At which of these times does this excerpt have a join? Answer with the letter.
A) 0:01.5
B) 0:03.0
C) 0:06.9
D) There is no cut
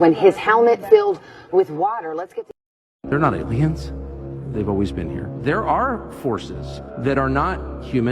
B